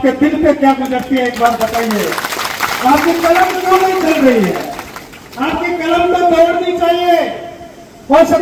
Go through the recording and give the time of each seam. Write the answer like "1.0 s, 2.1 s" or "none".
none